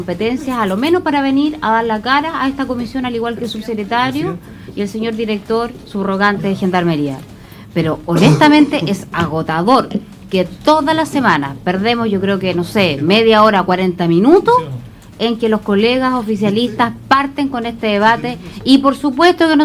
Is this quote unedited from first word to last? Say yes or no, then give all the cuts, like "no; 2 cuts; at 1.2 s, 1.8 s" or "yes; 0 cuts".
yes; 0 cuts